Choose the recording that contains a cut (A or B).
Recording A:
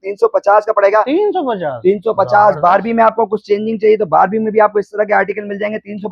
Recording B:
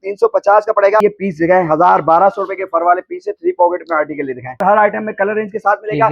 B